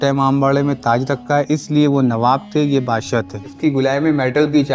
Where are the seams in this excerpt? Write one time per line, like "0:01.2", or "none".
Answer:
0:03.5

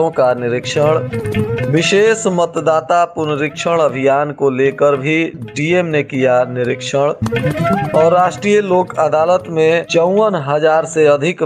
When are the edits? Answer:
none

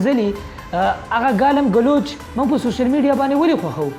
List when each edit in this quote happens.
none

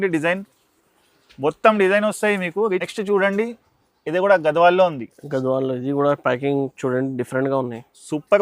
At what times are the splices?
0:02.9

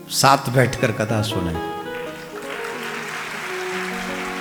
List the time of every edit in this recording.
none

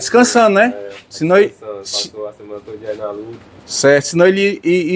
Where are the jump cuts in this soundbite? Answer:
none

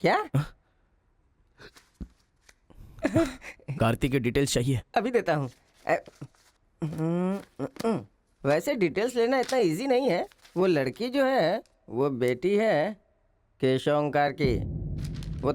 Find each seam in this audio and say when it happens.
none

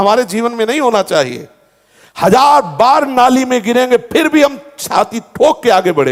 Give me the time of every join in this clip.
none

